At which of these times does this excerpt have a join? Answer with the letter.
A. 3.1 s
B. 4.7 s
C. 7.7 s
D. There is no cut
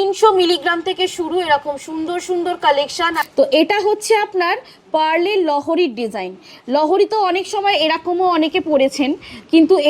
A